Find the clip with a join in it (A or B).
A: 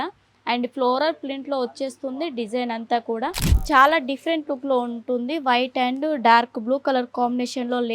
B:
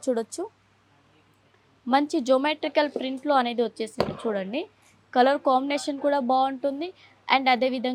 A